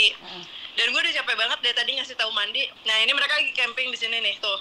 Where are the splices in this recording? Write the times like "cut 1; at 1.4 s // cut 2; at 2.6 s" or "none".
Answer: cut 1; at 2.8 s